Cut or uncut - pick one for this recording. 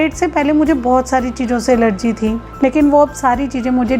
cut